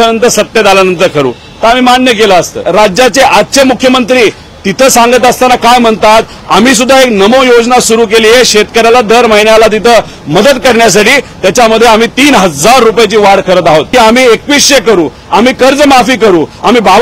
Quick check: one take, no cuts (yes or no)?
no